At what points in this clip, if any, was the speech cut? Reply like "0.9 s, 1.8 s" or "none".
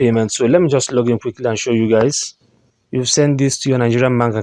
none